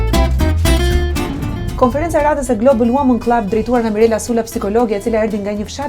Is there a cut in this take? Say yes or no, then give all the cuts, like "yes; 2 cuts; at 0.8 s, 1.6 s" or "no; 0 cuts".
yes; 1 cut; at 1.5 s